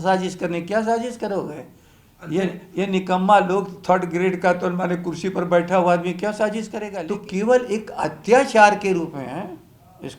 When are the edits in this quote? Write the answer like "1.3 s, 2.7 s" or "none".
6.8 s